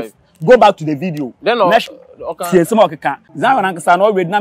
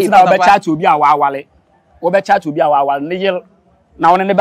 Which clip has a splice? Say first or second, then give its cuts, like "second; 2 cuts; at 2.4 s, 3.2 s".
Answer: first; 1 cut; at 3.2 s